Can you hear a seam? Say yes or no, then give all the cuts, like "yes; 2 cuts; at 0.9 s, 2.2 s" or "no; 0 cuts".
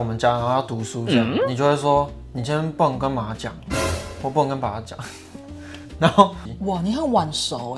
yes; 1 cut; at 6.5 s